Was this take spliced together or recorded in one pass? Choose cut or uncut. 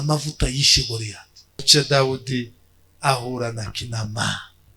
cut